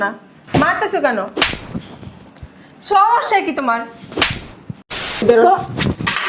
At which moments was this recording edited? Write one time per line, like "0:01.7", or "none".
0:05.2